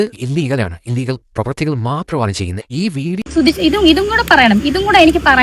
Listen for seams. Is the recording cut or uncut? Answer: cut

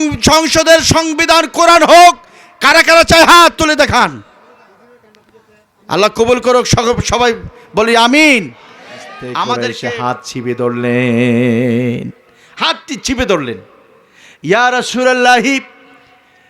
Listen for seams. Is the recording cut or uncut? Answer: cut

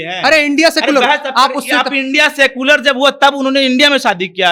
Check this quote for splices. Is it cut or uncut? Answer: uncut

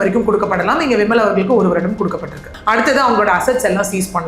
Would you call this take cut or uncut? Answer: cut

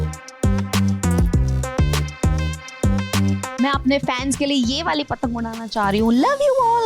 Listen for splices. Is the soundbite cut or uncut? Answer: cut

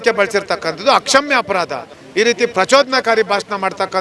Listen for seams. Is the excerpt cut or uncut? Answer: cut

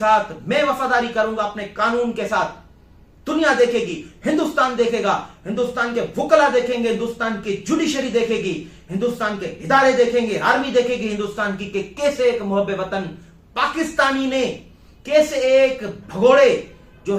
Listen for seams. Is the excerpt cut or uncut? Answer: uncut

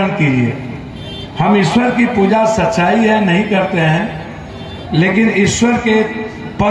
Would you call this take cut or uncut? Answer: uncut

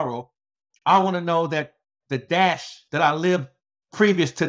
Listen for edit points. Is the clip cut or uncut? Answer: cut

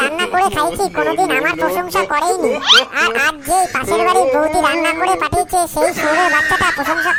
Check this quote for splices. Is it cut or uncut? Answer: uncut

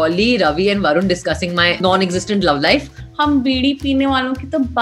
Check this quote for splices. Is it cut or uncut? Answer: cut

